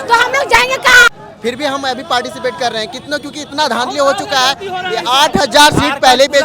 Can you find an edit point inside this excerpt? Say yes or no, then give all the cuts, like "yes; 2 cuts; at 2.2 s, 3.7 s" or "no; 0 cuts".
yes; 1 cut; at 1.1 s